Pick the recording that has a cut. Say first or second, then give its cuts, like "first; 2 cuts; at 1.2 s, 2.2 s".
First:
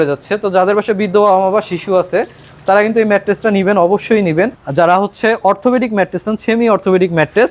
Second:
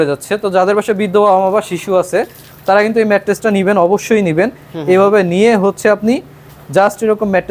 first; 1 cut; at 4.6 s